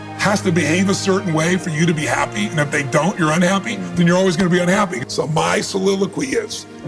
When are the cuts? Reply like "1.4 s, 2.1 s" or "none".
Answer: 5.0 s